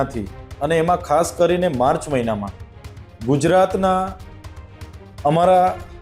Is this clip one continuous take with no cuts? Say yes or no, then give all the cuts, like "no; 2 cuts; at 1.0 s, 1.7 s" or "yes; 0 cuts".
yes; 0 cuts